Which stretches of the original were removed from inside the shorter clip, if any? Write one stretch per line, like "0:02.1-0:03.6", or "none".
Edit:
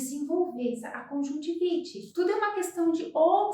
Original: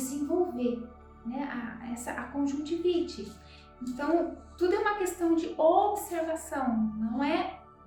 0:00.9-0:02.2
0:03.2-0:04.4